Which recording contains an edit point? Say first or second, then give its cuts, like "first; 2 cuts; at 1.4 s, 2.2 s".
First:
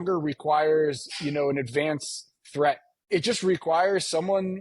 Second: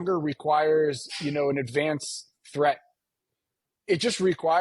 first; 1 cut; at 2.9 s